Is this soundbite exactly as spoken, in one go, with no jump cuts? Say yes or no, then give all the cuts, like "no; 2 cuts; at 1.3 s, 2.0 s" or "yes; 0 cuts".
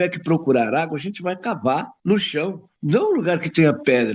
no; 2 cuts; at 1.9 s, 2.7 s